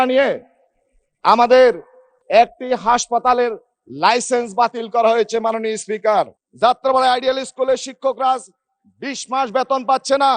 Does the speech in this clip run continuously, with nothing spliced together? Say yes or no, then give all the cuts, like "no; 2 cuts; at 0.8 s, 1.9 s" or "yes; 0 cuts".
no; 1 cut; at 6.4 s